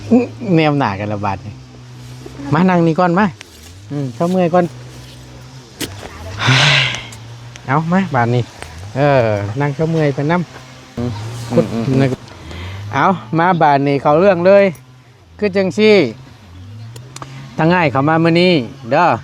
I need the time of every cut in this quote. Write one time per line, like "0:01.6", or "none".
0:12.1